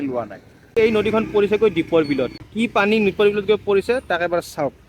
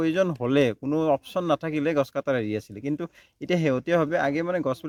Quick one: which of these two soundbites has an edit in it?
first; 2 cuts; at 0.7 s, 2.4 s

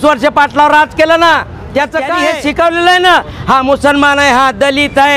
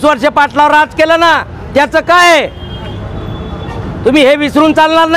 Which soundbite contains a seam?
first; 1 cut; at 2.1 s

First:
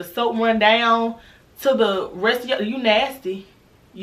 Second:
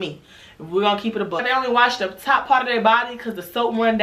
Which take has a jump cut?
second; 1 cut; at 1.4 s

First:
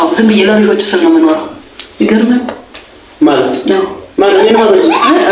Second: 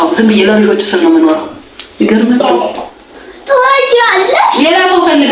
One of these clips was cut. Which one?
second; 1 cut; at 2.4 s

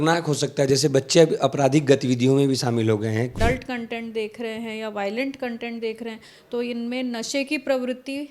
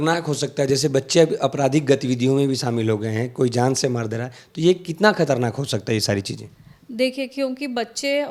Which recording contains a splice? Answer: first; 1 cut; at 3.3 s

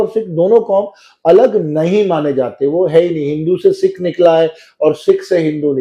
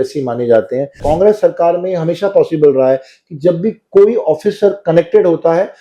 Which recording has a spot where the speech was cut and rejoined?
second; 1 cut; at 1.0 s

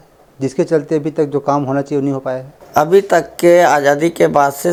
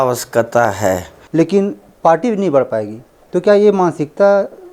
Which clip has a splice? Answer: second; 1 cut; at 1.2 s

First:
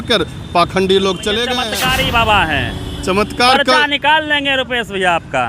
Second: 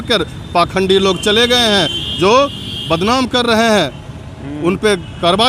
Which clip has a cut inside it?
first; 1 cut; at 1.6 s

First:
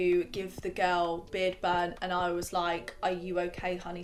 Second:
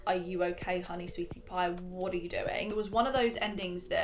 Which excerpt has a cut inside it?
second; 1 cut; at 2.7 s

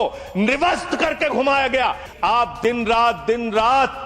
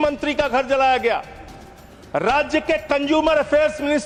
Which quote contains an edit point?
first; 1 cut; at 2.1 s

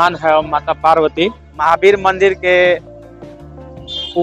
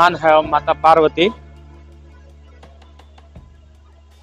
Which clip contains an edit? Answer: first; 1 cut; at 1.5 s

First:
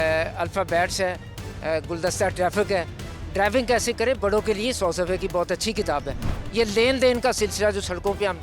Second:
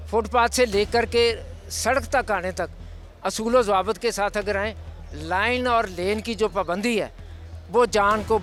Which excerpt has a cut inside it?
first; 1 cut; at 6.4 s

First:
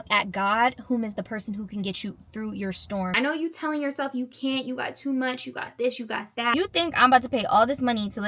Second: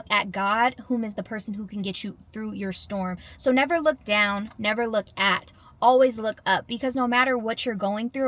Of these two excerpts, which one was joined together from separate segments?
first; 2 cuts; at 3.1 s, 6.5 s

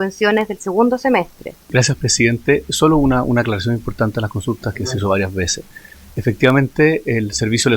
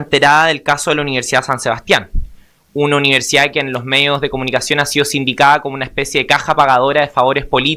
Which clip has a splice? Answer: first; 1 cut; at 1.7 s

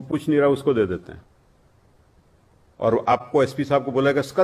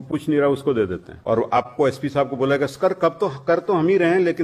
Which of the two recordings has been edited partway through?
second; 1 cut; at 1.1 s

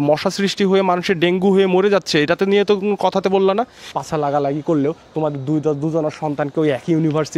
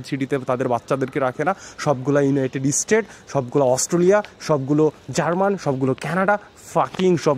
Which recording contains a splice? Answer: first; 1 cut; at 3.8 s

